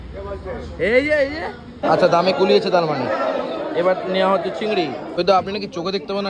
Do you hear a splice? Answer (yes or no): yes